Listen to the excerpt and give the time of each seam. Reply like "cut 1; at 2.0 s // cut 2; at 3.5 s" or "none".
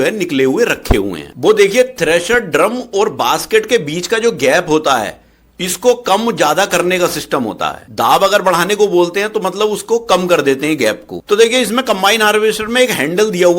cut 1; at 1.3 s